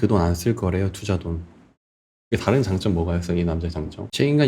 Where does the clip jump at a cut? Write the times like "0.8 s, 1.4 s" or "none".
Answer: 2.2 s